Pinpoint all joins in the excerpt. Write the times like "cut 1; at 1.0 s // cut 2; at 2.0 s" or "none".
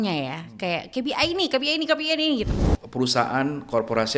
cut 1; at 2.5 s